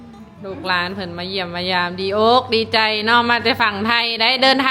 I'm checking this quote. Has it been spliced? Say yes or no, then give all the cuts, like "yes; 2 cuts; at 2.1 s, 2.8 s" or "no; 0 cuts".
no; 0 cuts